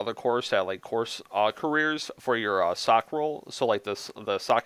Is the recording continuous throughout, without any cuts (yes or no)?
yes